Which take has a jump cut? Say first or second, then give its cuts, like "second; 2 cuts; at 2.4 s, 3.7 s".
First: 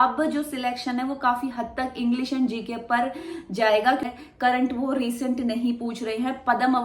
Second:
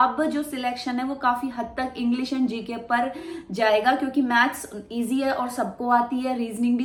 first; 1 cut; at 4.1 s